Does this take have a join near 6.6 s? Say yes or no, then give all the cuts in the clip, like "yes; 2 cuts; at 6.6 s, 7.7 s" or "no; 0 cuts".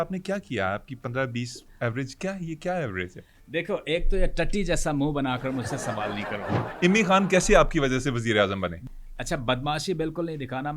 yes; 2 cuts; at 6.6 s, 8.9 s